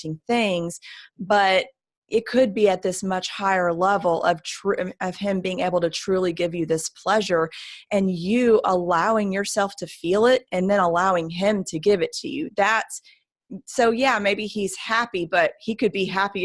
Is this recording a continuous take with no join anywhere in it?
yes; 0 cuts

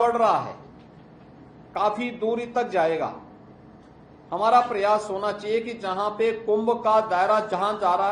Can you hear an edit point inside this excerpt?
no; 0 cuts

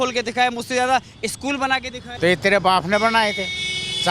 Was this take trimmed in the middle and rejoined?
yes; 1 cut; at 2.0 s

